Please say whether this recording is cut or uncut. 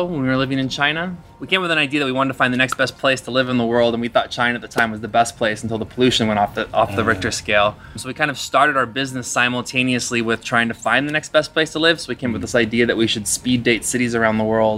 cut